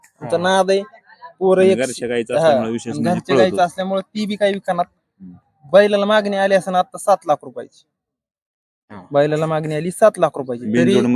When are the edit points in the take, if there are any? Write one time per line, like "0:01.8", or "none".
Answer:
none